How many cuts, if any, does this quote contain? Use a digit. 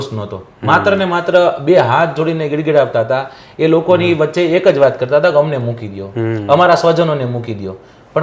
0